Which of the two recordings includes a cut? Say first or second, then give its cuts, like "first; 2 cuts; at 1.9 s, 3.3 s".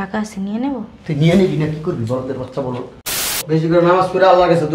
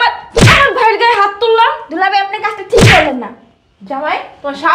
first; 1 cut; at 3.3 s